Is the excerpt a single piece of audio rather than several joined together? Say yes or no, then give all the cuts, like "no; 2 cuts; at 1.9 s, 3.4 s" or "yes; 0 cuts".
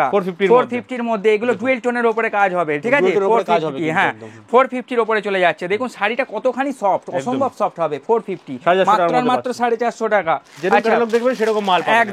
yes; 0 cuts